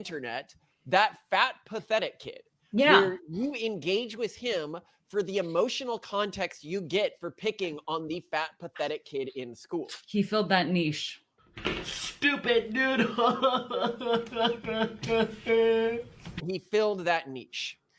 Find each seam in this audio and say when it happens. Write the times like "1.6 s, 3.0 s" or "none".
11.4 s, 16.4 s